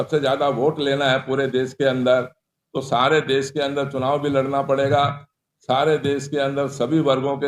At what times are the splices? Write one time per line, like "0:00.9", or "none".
none